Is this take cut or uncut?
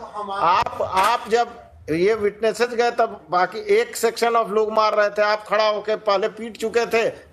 uncut